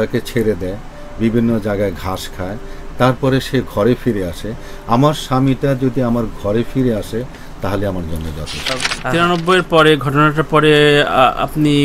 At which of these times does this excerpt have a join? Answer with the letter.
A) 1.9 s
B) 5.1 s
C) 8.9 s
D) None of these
C